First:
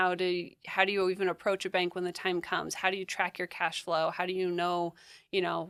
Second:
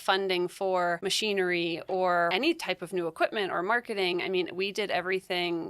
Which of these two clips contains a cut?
second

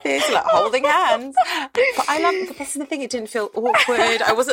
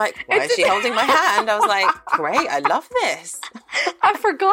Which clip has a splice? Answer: first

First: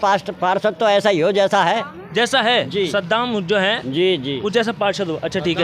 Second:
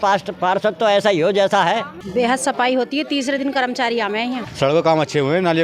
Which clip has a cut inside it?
second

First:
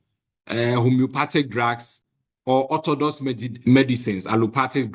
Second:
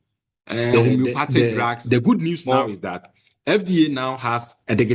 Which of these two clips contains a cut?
second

